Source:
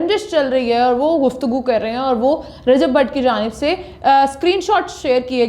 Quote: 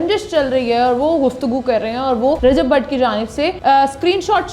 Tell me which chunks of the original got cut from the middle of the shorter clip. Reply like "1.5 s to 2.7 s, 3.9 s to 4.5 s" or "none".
2.4 s to 2.6 s, 3.8 s to 4.0 s